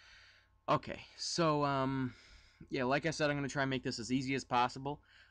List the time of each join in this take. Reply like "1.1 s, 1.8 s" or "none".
1.3 s